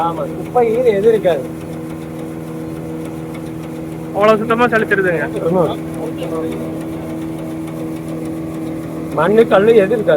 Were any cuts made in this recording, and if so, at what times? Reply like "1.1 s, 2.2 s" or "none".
none